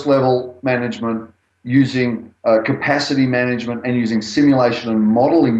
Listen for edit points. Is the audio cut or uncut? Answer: uncut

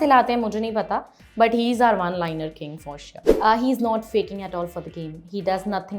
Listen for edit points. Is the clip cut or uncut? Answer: cut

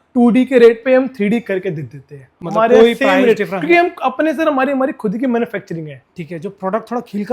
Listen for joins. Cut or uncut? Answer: uncut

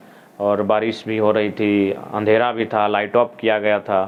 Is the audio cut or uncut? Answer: uncut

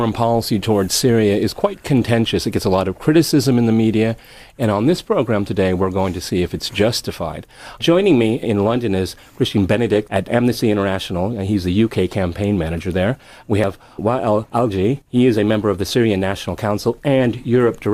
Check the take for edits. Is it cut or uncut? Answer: uncut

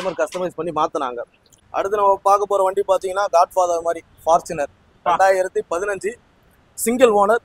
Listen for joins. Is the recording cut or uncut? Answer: cut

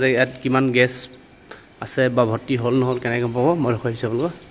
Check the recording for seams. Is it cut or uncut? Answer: uncut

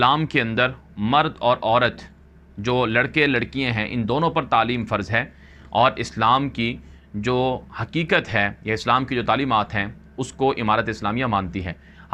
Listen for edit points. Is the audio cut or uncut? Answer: uncut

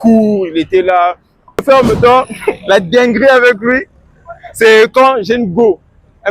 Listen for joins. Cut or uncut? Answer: cut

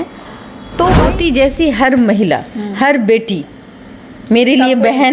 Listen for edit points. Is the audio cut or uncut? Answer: cut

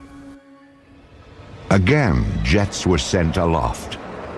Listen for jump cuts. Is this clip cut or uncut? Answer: cut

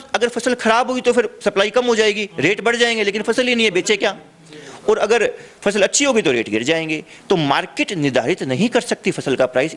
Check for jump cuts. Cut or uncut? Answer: uncut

